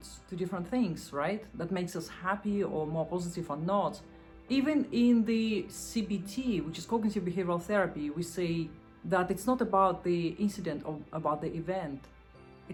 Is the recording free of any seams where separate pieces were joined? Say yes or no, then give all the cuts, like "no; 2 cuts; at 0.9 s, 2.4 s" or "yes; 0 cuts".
yes; 0 cuts